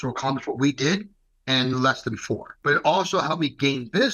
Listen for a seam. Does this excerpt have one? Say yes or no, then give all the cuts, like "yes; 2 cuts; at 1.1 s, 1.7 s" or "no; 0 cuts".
yes; 1 cut; at 2.5 s